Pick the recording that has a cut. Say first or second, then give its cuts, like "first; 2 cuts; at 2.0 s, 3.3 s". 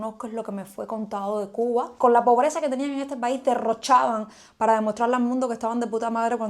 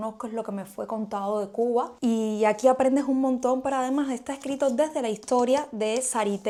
first; 1 cut; at 1.9 s